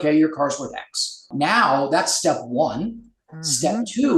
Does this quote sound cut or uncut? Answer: cut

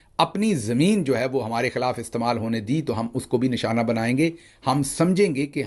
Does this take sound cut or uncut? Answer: uncut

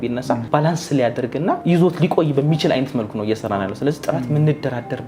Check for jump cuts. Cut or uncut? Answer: uncut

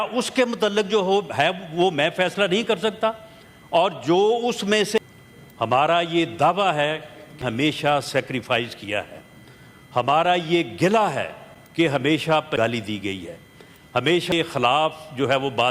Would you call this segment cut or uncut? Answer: cut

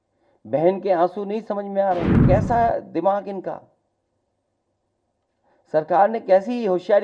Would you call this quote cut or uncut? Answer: cut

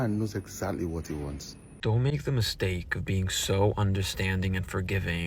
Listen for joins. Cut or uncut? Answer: cut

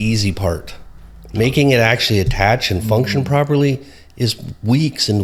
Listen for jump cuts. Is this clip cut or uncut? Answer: uncut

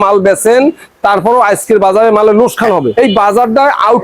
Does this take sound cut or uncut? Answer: cut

